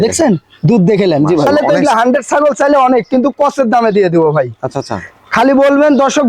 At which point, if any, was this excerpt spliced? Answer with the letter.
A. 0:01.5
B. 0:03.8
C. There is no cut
A